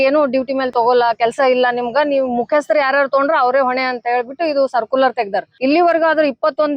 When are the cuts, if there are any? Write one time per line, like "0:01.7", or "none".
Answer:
0:05.5